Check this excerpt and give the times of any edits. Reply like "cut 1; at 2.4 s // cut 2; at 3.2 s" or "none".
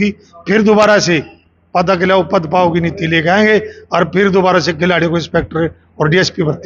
none

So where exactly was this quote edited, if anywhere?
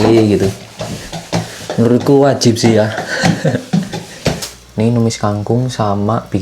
cut 1; at 4.5 s

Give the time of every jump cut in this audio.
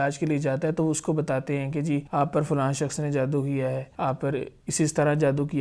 cut 1; at 2.1 s // cut 2; at 3.9 s

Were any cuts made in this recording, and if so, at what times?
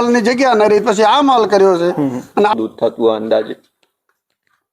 cut 1; at 2.5 s

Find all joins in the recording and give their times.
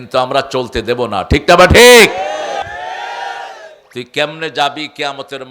cut 1; at 2.6 s

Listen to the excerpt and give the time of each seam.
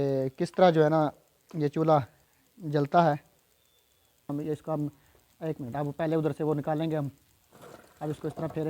cut 1; at 4.3 s

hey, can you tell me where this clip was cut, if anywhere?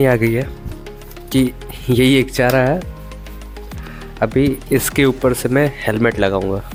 none

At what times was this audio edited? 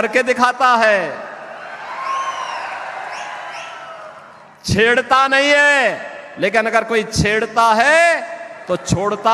none

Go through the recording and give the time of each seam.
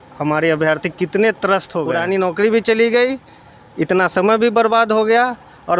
cut 1; at 1.8 s

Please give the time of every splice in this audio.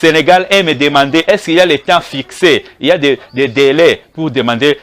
none

